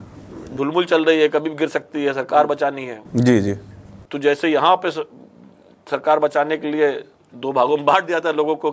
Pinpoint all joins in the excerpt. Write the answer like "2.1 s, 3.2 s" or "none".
none